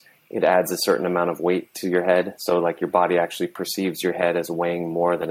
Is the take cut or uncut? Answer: uncut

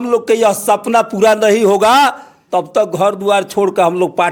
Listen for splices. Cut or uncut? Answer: uncut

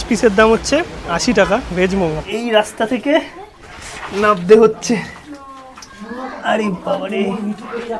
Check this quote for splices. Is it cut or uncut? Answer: cut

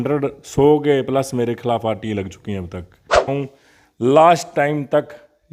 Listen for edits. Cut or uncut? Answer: cut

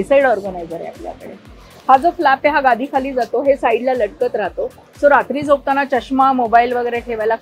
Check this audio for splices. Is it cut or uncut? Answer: uncut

